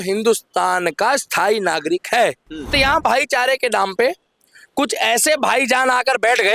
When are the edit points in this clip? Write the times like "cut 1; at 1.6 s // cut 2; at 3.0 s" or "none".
cut 1; at 2.7 s

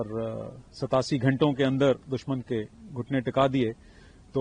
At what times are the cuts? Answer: none

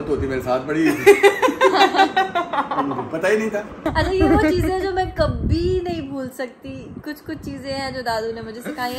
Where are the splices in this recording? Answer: cut 1; at 3.9 s

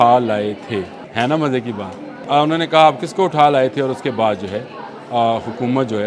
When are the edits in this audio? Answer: cut 1; at 1.0 s // cut 2; at 2.1 s

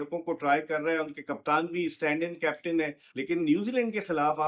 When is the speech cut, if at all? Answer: cut 1; at 3.0 s

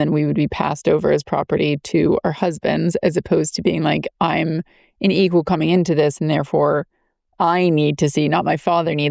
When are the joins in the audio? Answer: none

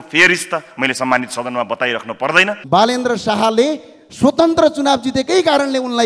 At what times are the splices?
cut 1; at 2.6 s

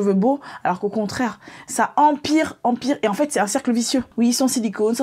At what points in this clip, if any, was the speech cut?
cut 1; at 4.1 s

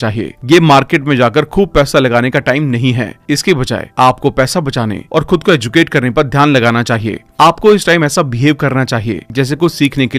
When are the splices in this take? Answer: none

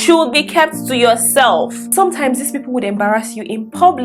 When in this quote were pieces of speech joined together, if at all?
cut 1; at 1.8 s

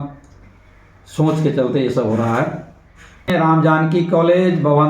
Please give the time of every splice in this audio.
cut 1; at 3.3 s

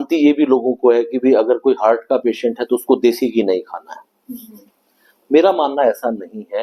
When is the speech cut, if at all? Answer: none

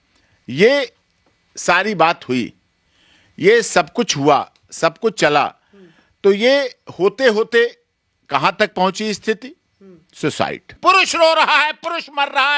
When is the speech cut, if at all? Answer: cut 1; at 10.7 s

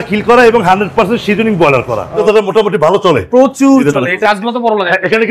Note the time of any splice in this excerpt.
cut 1; at 2.1 s // cut 2; at 4.2 s

